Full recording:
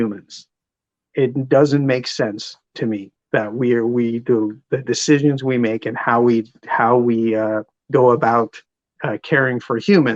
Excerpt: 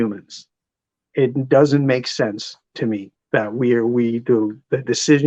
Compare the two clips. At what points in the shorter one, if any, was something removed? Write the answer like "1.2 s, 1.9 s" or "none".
none